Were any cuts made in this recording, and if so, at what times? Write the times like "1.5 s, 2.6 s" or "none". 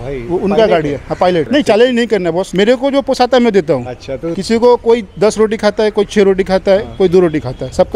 1.4 s